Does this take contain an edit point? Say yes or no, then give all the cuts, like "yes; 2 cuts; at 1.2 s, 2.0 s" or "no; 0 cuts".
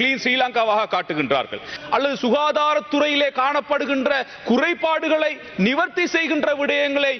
yes; 1 cut; at 1.7 s